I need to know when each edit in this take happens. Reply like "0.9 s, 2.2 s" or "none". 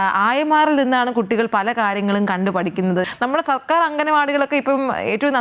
3.1 s

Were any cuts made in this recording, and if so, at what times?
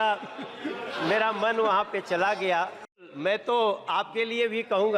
3.1 s

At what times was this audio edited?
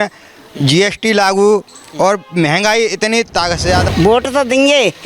3.9 s

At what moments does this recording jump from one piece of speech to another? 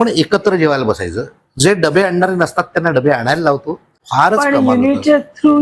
4.0 s

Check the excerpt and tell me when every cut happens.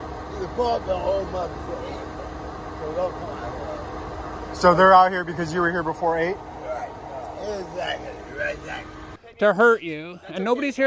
9.2 s

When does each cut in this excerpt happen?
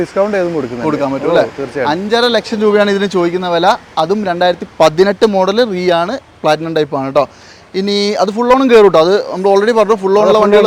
none

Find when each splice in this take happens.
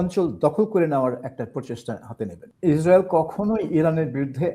2.4 s

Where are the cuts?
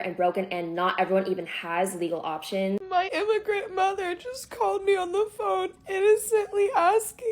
2.8 s

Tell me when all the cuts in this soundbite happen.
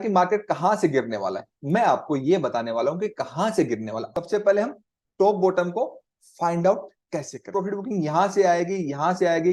4.0 s, 7.5 s

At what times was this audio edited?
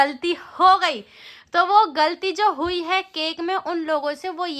none

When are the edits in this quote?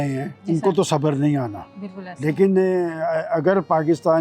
none

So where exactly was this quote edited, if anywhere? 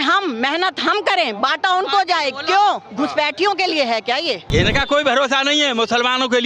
4.4 s

